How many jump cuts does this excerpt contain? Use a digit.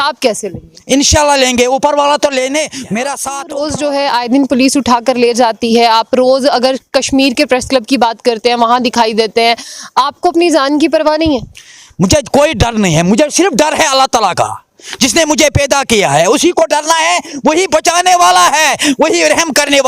1